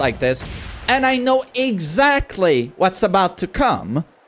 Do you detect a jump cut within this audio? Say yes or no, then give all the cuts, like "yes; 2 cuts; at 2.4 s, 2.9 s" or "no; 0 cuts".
no; 0 cuts